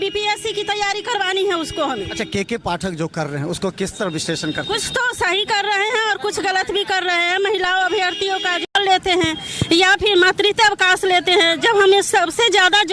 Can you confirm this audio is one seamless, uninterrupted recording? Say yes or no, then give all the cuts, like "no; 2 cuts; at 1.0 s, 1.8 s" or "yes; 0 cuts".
no; 1 cut; at 8.7 s